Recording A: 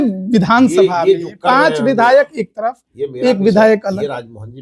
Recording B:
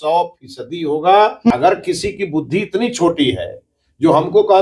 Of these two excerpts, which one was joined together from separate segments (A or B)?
B